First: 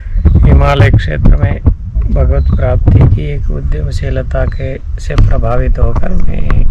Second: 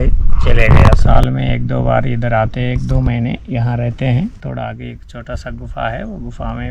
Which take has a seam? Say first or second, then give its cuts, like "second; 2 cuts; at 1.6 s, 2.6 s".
second; 2 cuts; at 1.0 s, 4.4 s